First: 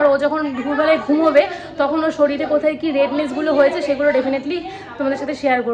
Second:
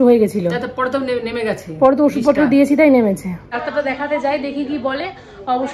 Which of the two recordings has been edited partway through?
second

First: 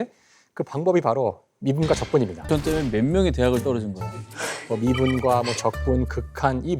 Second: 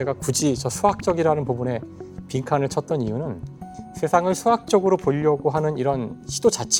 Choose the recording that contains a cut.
first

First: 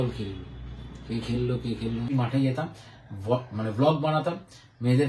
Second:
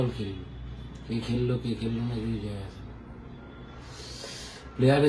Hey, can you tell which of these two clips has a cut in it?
first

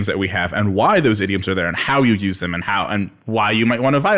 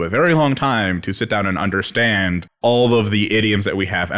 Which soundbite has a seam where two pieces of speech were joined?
second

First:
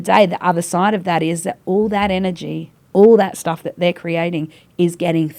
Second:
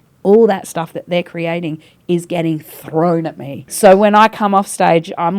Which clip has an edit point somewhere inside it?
second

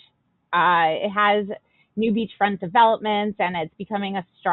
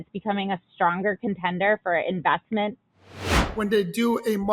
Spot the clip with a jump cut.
second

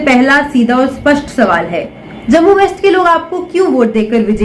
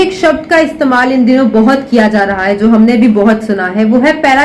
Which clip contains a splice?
first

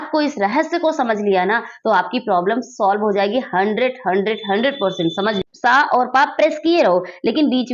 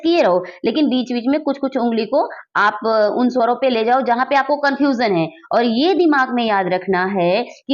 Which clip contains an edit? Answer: first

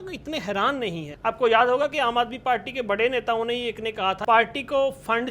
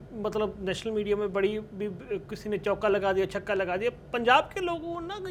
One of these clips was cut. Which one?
first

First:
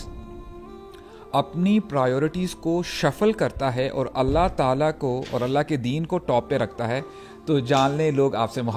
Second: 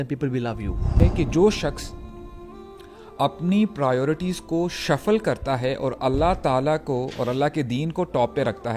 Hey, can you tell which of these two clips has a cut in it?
second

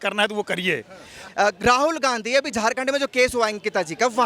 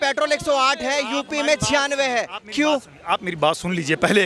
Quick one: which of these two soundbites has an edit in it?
first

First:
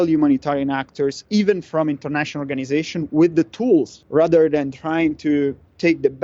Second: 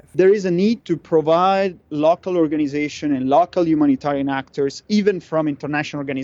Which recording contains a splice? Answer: first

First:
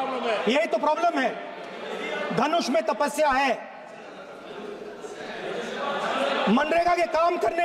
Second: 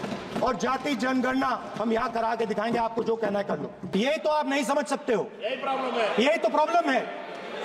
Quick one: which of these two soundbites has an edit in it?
second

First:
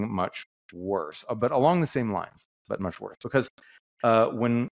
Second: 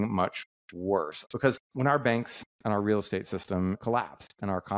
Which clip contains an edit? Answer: second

